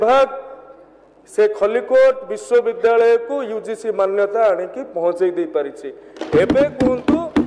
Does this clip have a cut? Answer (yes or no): no